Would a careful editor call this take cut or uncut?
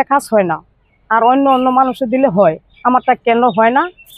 uncut